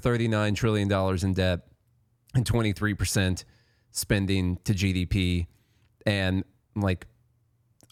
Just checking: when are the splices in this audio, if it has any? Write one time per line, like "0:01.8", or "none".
none